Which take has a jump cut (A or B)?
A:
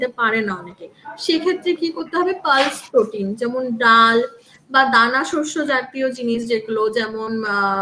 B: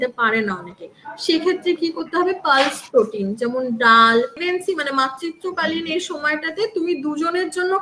B